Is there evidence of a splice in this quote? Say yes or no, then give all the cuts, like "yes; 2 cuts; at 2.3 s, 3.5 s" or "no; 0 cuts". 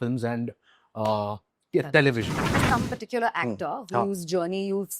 yes; 1 cut; at 2.6 s